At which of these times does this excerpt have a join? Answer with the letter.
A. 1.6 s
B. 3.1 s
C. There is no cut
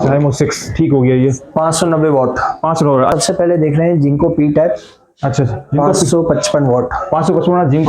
B